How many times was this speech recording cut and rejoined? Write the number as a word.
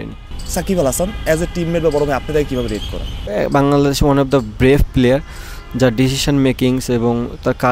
one